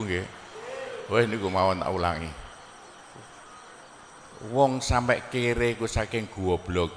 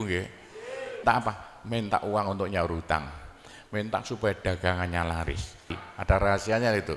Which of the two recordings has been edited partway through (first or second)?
second